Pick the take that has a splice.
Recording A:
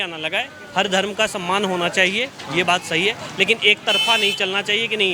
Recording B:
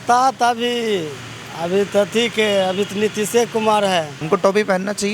B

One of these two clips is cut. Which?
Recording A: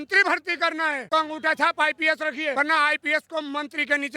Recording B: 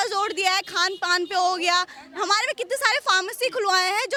A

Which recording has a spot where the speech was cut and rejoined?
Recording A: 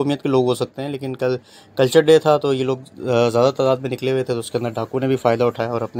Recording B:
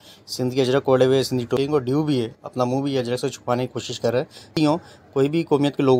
B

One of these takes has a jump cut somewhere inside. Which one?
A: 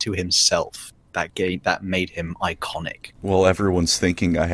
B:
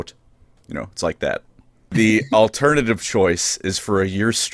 B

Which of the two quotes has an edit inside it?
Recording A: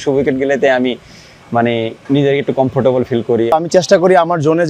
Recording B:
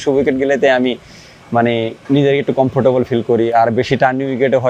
A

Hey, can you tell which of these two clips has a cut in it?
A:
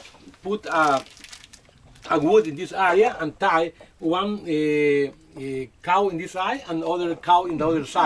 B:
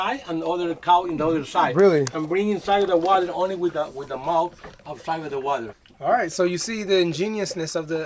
B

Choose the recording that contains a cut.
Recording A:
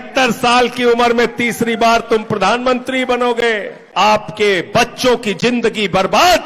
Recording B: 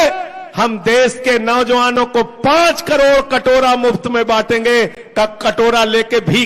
A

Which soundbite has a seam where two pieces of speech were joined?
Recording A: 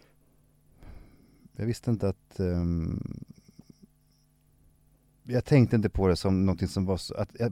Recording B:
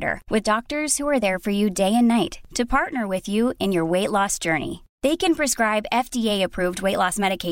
A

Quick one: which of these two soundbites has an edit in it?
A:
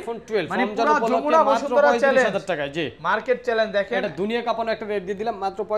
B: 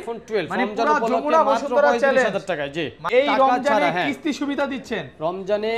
B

